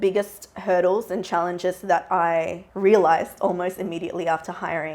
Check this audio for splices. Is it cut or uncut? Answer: cut